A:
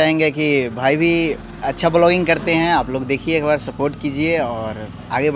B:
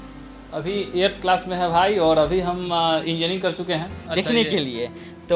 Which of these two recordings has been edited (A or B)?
B